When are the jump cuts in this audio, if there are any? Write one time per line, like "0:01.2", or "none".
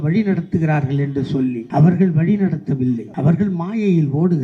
0:01.6
0:03.1